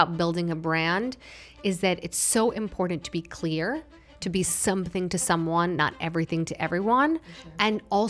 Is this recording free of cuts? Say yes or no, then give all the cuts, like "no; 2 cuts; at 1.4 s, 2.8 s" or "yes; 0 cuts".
yes; 0 cuts